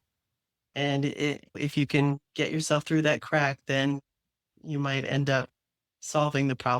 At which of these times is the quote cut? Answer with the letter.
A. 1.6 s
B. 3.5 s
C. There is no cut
A